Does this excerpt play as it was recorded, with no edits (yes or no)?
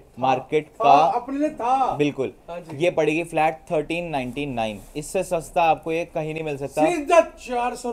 yes